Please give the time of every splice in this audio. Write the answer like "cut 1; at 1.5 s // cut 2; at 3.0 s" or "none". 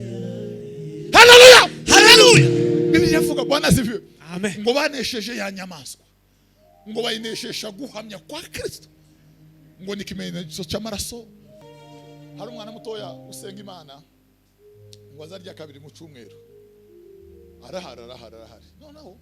cut 1; at 11.5 s